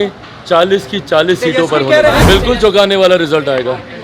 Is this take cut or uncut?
cut